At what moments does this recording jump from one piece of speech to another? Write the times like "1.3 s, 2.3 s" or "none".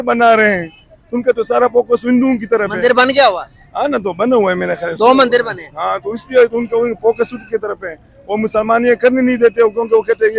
none

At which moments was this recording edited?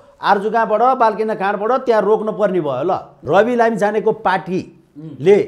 3.1 s

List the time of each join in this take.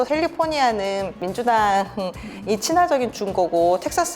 1.2 s

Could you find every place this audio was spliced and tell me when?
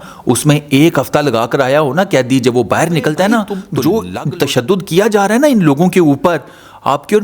3.6 s

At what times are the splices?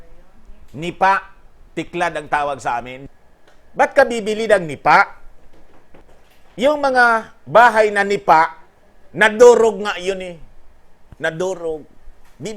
3.0 s, 6.0 s

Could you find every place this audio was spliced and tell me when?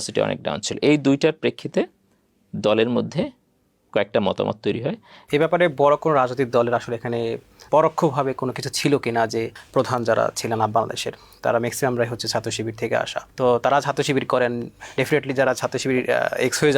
5.1 s, 9.6 s, 13.2 s

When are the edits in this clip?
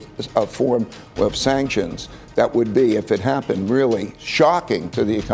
4.4 s

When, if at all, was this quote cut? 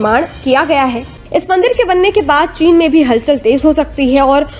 1.1 s

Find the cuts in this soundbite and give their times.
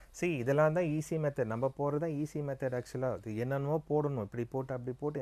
none

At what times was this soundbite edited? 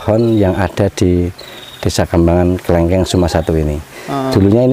none

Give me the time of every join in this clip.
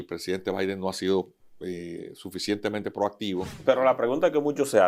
3.6 s

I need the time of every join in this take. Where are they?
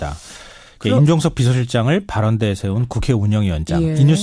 1.9 s

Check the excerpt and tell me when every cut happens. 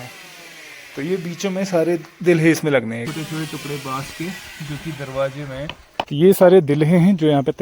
3.1 s, 6.1 s

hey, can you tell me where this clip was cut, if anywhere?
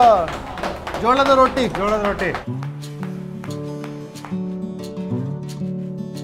2.4 s

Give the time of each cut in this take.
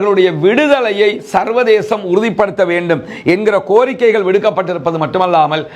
none

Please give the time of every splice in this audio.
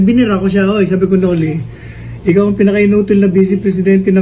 2.3 s

